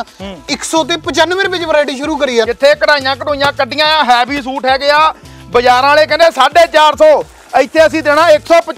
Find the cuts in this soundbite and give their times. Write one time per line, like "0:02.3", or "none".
0:02.5